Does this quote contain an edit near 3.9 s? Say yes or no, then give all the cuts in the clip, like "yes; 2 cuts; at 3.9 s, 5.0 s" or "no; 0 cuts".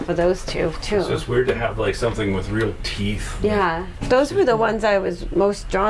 no; 0 cuts